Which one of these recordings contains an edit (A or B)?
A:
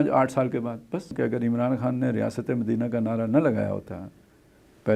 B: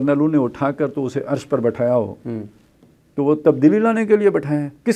A